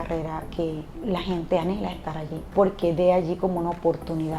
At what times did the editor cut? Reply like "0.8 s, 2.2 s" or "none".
0.9 s, 2.5 s